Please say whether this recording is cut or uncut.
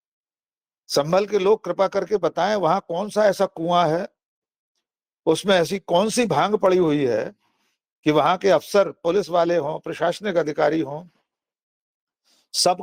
uncut